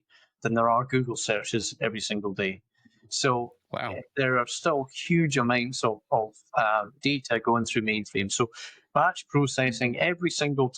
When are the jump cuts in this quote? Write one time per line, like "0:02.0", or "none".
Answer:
0:06.9